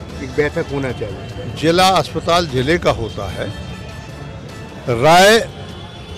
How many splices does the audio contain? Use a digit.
1